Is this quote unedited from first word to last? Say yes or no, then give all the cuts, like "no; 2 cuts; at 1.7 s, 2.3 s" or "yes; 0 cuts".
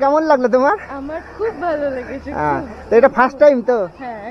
yes; 0 cuts